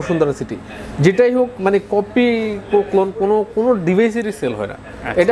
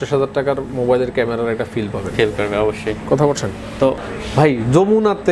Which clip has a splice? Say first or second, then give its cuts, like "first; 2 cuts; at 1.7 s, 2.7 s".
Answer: second; 1 cut; at 4.1 s